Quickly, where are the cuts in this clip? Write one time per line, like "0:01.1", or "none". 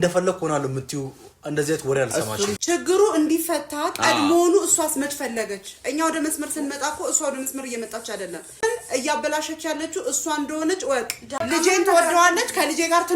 0:02.6
0:08.5
0:11.4